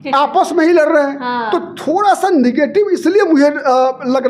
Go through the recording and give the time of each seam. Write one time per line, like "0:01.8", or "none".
none